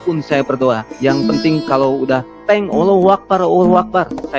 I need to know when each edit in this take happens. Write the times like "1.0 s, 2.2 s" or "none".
none